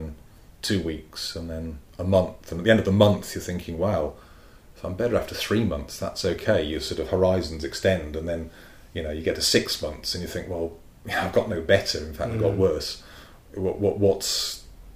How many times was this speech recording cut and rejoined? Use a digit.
0